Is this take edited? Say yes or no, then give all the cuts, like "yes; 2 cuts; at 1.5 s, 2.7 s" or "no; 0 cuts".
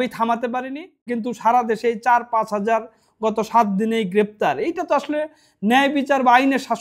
yes; 1 cut; at 1.0 s